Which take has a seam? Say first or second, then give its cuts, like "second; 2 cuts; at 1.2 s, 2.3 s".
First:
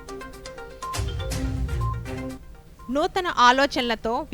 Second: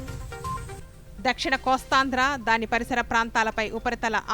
second; 1 cut; at 1.0 s